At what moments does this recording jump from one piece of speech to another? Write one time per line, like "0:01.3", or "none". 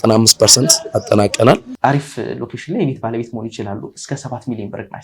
0:01.7